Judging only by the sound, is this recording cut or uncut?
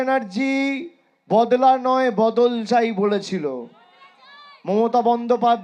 uncut